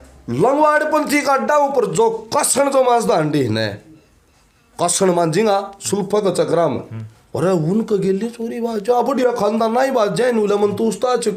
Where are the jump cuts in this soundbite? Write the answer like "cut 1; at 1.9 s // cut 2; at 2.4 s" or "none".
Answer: none

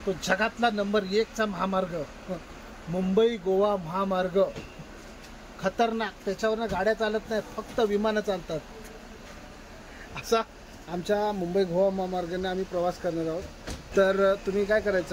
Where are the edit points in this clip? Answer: cut 1; at 13.9 s

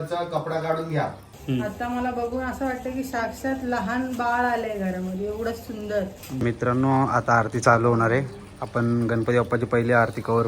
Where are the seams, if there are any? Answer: cut 1; at 1.2 s // cut 2; at 6.3 s

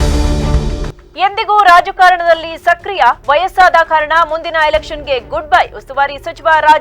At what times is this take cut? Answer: cut 1; at 1.0 s

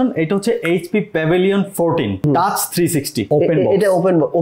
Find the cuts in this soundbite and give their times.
cut 1; at 2.2 s // cut 2; at 3.3 s

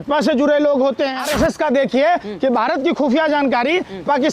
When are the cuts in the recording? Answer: cut 1; at 1.2 s

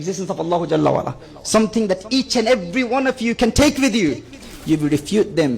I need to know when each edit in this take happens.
cut 1; at 4.4 s

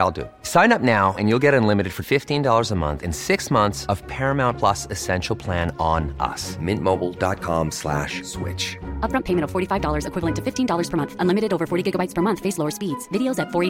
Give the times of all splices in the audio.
none

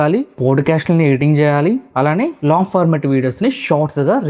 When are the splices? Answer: none

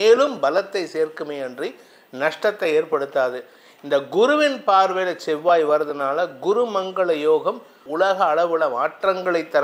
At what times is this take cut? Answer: cut 1; at 7.8 s

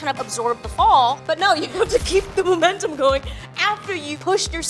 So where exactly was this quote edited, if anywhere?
none

